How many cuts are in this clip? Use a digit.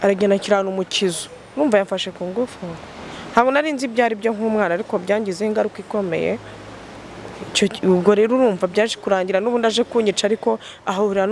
0